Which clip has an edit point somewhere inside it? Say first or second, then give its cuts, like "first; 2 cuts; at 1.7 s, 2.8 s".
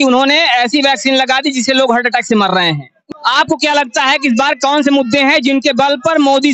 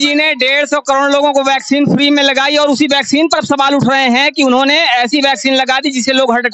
first; 1 cut; at 3.0 s